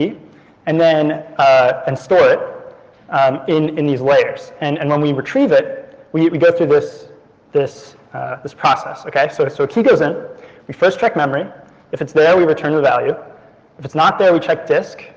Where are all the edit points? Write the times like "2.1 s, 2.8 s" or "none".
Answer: 1.8 s